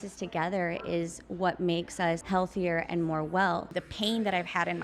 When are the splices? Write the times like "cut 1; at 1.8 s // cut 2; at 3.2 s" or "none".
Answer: cut 1; at 2.2 s // cut 2; at 3.8 s